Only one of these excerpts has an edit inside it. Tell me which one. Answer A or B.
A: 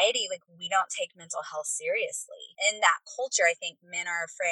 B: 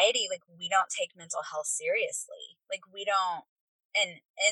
A